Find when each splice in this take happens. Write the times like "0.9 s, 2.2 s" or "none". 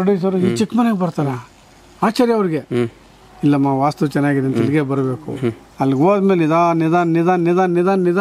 5.6 s